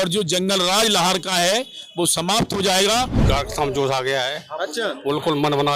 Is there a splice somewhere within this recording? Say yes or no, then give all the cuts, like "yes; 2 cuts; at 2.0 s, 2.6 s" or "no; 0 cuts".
yes; 1 cut; at 3.2 s